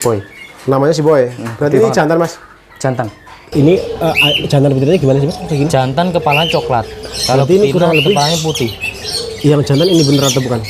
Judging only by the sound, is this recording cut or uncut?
cut